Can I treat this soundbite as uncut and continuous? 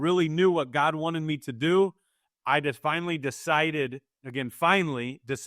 yes; 0 cuts

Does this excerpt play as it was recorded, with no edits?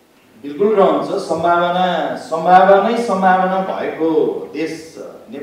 yes; 0 cuts

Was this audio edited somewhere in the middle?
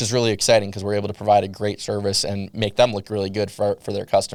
no; 0 cuts

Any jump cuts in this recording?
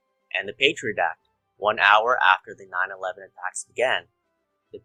no; 0 cuts

